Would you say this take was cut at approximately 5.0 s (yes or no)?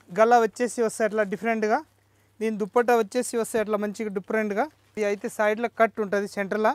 yes